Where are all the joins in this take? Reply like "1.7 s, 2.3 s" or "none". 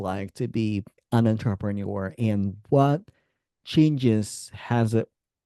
1.0 s